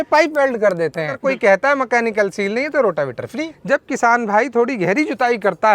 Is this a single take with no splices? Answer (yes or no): no